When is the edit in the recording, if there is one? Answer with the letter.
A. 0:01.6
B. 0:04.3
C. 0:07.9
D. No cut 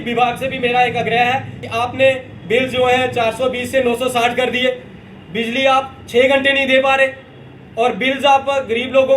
A